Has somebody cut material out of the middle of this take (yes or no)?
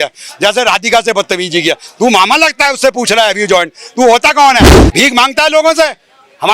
yes